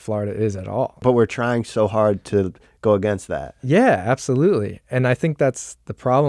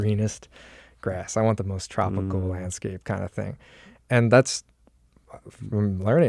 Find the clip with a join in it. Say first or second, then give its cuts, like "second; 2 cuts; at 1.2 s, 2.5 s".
first; 1 cut; at 1.0 s